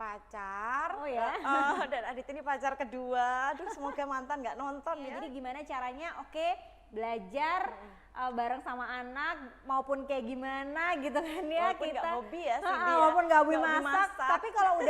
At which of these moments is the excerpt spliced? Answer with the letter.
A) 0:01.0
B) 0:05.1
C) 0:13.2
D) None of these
B